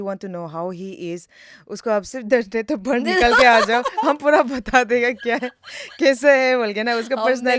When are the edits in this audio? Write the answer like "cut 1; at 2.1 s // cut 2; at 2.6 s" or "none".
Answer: none